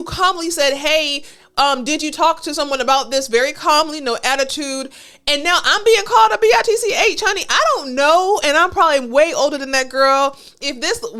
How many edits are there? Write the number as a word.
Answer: zero